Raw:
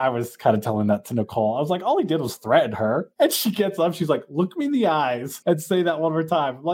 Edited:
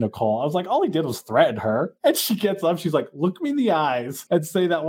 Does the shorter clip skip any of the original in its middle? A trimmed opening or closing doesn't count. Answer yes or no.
no